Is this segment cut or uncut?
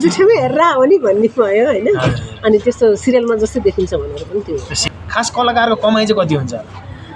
cut